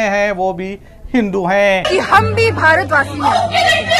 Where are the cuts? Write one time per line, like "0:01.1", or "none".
0:01.8